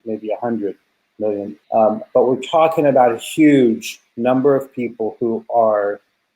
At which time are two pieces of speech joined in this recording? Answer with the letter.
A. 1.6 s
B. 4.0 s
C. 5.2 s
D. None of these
A